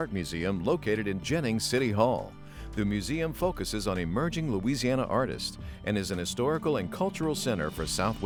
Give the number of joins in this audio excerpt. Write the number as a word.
zero